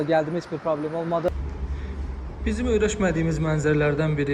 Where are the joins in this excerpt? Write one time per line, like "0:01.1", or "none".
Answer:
0:01.3